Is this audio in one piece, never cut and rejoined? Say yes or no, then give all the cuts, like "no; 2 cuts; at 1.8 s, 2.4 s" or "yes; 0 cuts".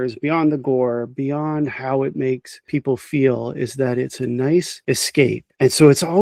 yes; 0 cuts